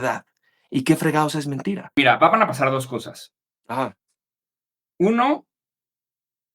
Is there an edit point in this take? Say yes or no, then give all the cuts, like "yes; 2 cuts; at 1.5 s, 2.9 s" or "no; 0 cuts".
yes; 1 cut; at 1.8 s